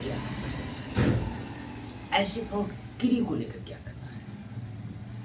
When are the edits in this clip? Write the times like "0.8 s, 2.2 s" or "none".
none